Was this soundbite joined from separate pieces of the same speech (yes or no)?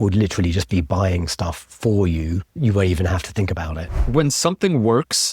yes